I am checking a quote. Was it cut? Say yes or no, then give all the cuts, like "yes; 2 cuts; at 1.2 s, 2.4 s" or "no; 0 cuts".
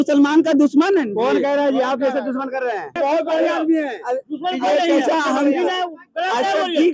yes; 1 cut; at 2.9 s